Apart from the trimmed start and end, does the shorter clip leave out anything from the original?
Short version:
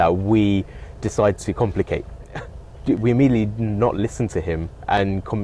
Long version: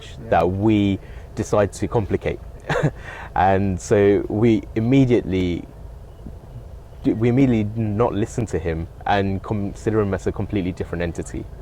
yes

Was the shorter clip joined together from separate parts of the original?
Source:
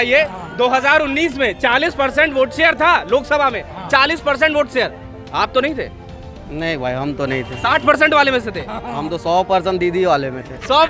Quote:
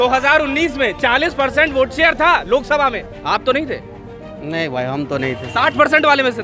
yes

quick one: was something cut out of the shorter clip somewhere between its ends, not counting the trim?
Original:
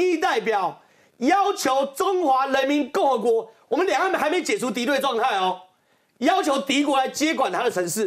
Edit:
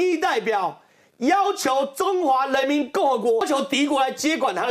yes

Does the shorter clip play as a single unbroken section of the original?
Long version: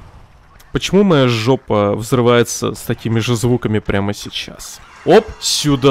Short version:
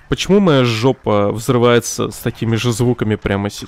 yes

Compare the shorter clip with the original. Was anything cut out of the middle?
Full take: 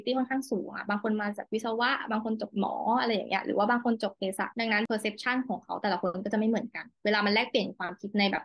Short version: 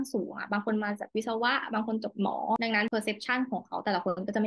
yes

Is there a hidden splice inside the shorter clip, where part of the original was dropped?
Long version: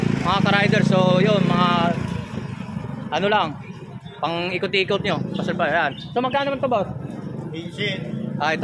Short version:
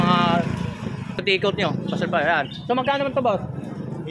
yes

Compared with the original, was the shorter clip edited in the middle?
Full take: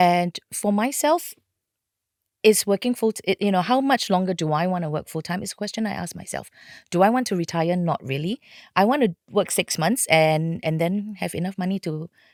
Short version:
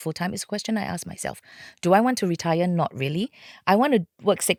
no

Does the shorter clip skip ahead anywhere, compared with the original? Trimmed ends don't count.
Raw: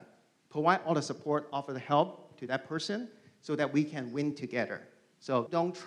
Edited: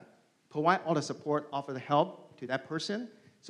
no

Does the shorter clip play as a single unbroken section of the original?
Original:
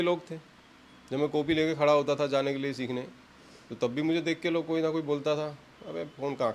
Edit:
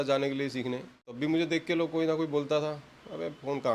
no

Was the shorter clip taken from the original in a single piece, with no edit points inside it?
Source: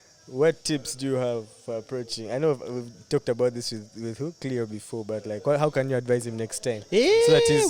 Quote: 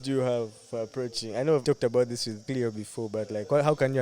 no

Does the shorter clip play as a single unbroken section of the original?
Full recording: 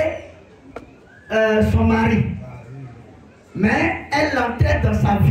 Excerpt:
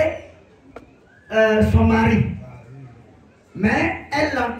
yes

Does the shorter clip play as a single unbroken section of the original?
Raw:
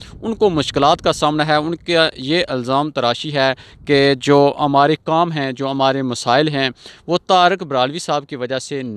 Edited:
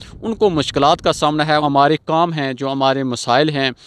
no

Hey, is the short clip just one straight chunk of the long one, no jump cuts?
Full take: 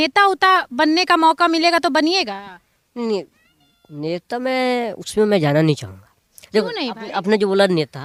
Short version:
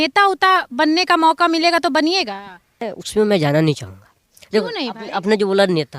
no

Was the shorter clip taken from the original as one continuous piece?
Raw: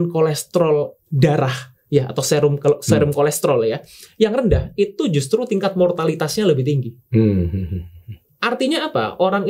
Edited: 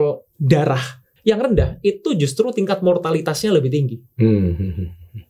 no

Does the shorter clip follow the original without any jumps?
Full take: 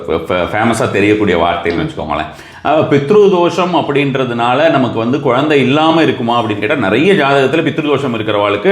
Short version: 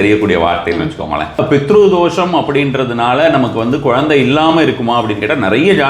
no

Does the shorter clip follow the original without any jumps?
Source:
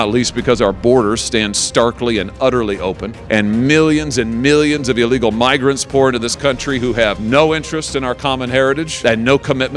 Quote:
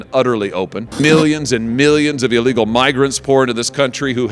no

